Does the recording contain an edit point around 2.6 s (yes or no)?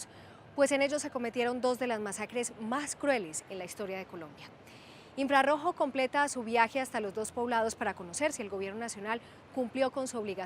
yes